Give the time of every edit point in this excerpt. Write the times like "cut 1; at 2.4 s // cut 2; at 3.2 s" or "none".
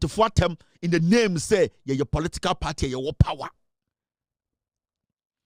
none